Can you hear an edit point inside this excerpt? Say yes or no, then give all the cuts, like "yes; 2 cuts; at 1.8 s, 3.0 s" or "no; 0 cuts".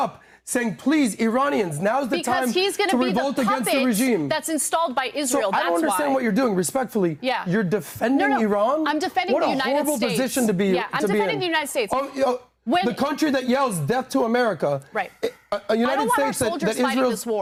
no; 0 cuts